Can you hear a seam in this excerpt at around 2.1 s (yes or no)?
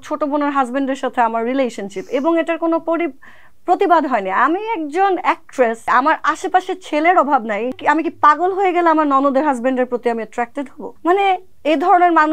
no